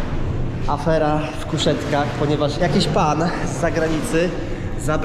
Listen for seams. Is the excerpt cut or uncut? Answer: uncut